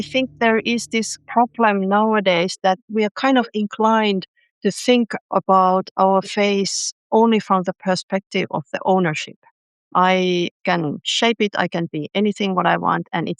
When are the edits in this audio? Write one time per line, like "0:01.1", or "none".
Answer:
0:01.2
0:02.9
0:09.8